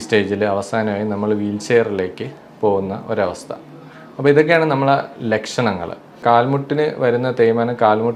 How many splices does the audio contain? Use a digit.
1